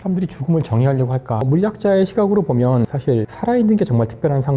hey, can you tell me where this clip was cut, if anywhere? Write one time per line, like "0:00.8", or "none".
0:01.4